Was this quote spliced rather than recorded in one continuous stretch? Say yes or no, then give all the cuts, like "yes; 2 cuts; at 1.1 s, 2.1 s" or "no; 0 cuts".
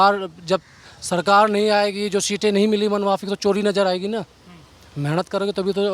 no; 0 cuts